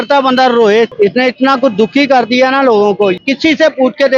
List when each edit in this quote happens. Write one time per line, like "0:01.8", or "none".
0:00.9
0:03.2